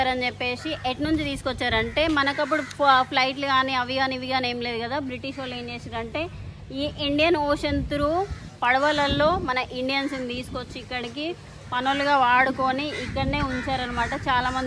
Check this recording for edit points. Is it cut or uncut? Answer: uncut